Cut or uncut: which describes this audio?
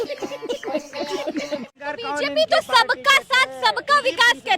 cut